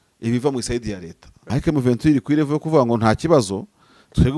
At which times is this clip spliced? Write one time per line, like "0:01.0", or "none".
0:01.4